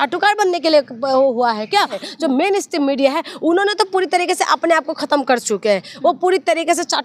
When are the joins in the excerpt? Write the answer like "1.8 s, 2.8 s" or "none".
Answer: 2.0 s